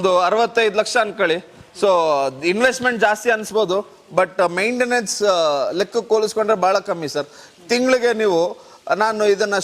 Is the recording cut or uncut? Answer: uncut